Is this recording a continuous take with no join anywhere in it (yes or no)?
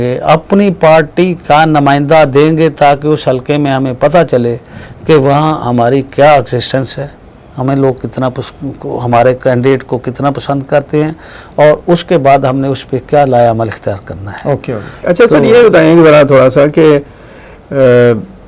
yes